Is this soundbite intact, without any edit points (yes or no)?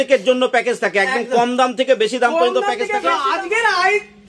no